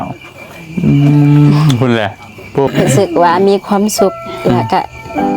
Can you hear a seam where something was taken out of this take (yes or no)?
yes